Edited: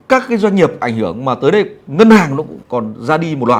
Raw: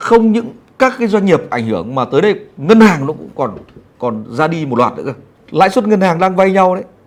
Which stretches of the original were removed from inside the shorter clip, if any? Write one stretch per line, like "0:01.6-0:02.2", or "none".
0:03.3-0:03.9